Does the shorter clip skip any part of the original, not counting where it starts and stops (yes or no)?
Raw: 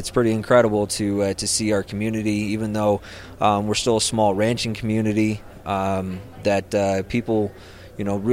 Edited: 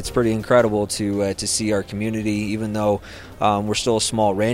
no